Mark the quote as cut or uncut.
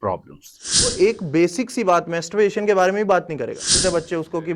cut